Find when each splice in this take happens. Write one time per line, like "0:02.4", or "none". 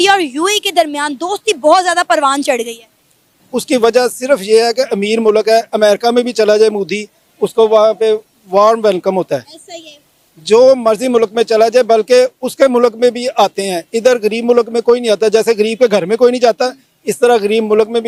none